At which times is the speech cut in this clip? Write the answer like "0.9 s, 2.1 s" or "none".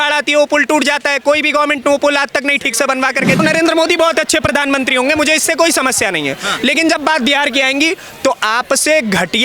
3.4 s